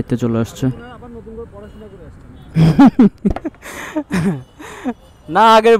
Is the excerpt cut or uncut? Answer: uncut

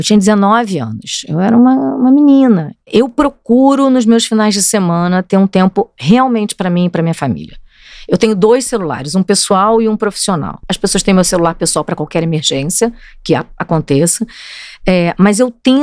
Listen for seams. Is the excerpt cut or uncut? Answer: cut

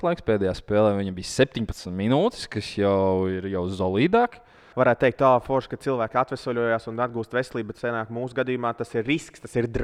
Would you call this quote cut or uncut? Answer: cut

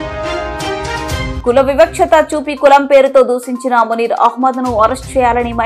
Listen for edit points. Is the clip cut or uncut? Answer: cut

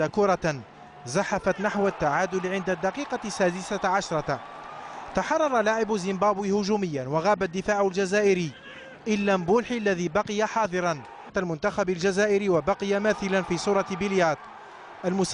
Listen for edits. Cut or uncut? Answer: uncut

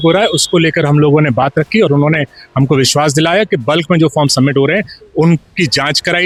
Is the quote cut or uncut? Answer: uncut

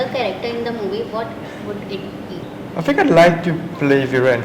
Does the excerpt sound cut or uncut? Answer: cut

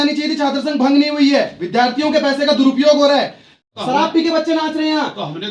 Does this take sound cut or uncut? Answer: cut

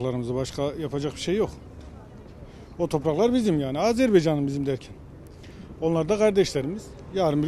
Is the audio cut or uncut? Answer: uncut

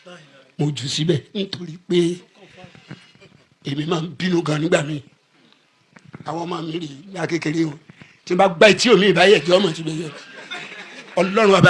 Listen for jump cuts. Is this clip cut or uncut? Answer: uncut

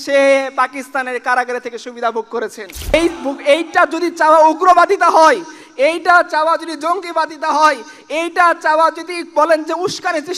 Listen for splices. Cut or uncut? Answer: cut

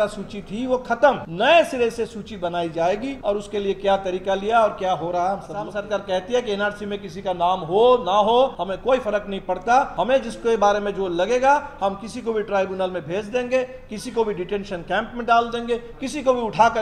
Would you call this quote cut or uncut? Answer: cut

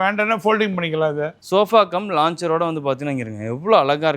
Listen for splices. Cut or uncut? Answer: cut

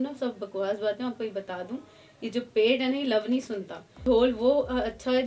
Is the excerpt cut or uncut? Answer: cut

